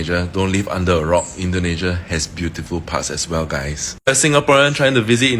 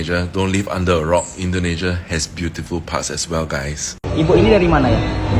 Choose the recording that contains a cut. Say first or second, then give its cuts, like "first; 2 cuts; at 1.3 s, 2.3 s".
second; 1 cut; at 4.0 s